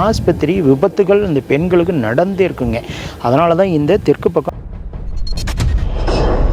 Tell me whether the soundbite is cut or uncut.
cut